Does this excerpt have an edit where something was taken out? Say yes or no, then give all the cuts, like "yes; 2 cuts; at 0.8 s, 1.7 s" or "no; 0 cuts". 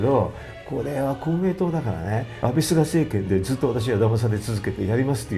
yes; 1 cut; at 2.3 s